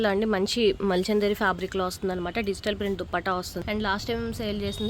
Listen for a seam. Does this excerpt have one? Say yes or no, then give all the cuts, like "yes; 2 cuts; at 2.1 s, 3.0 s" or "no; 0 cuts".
yes; 1 cut; at 3.5 s